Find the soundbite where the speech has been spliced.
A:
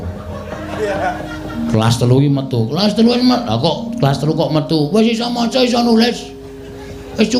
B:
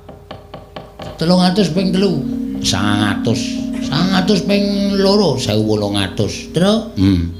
B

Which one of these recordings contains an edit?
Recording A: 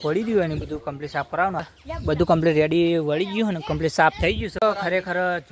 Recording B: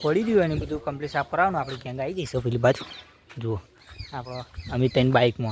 A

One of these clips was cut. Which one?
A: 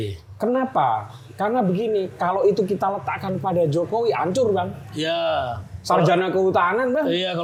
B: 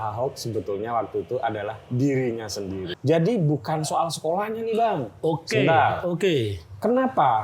B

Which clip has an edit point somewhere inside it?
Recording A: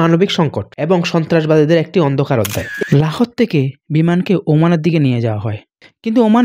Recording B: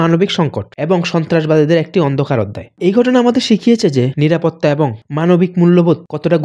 A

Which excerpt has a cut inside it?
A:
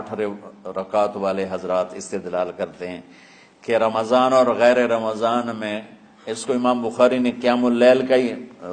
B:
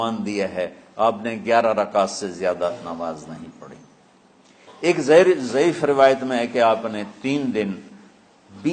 B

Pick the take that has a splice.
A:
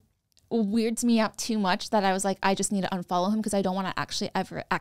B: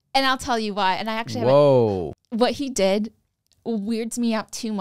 B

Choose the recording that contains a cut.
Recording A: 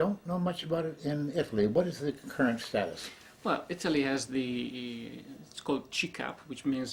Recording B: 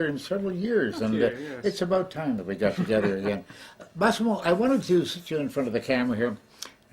B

